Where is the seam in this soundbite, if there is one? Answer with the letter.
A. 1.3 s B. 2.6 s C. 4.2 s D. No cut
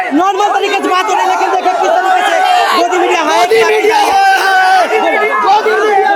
D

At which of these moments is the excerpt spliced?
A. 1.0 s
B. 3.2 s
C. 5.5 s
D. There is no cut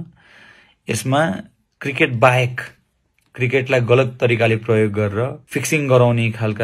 C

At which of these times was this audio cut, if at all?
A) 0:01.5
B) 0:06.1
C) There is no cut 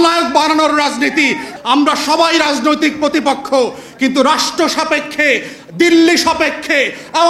A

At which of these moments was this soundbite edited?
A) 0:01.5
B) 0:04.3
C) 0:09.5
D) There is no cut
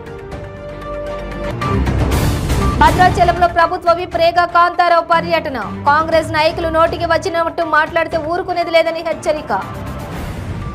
D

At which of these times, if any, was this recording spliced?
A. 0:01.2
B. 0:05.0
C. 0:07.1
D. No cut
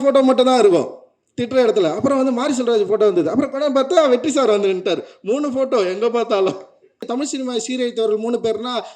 C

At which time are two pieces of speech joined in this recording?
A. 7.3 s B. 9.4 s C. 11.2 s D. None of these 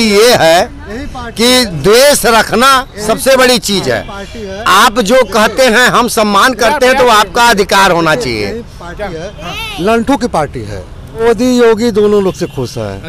C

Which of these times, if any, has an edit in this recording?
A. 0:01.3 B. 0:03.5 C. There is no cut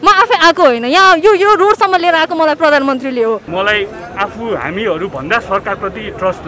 B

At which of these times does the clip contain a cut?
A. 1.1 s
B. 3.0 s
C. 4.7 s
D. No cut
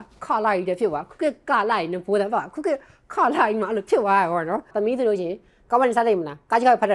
C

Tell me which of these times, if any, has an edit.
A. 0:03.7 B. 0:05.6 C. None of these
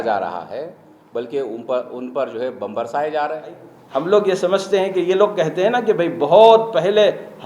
A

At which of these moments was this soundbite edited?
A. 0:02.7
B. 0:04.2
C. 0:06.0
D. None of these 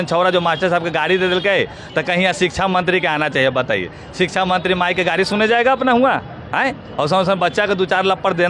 D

